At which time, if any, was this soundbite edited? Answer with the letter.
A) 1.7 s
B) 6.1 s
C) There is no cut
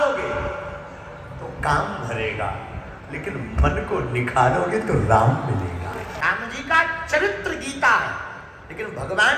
B